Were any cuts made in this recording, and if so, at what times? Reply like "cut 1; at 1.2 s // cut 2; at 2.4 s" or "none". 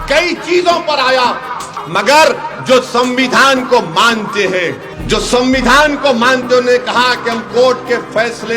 cut 1; at 1.7 s // cut 2; at 4.9 s